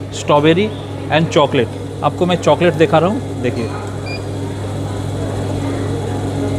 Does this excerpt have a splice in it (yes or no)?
no